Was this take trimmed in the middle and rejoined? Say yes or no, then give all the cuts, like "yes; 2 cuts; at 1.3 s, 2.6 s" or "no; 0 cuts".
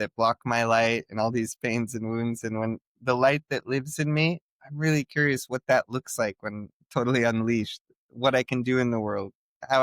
no; 0 cuts